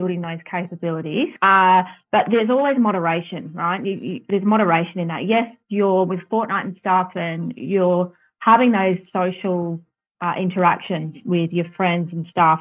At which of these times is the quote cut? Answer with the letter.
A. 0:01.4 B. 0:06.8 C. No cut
A